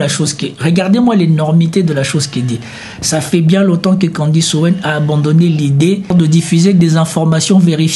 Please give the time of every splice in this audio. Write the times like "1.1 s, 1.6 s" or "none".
6.1 s